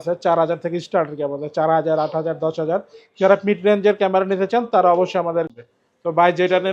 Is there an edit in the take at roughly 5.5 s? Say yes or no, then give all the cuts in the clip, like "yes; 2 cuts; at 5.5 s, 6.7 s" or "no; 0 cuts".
yes; 1 cut; at 5.5 s